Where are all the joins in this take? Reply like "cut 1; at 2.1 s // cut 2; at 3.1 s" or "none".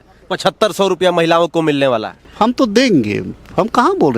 cut 1; at 2.3 s

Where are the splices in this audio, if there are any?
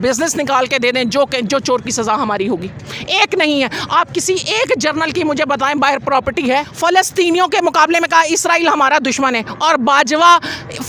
cut 1; at 6.7 s

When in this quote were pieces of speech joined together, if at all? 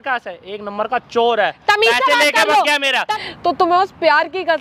cut 1; at 3.1 s

